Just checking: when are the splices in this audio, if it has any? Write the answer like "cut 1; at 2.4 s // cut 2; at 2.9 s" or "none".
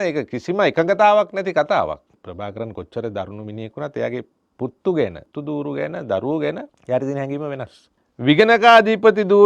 cut 1; at 2.2 s // cut 2; at 4.4 s // cut 3; at 5.3 s // cut 4; at 6.7 s // cut 5; at 8.1 s